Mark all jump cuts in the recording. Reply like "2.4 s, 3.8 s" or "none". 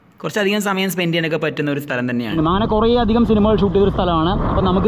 2.3 s